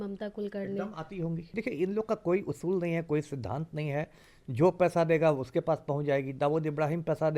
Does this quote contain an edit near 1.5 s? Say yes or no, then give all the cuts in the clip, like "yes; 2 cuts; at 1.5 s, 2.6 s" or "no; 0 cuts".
yes; 1 cut; at 1.5 s